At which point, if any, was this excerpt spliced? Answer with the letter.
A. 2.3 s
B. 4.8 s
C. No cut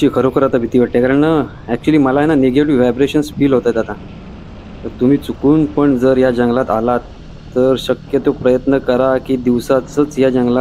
C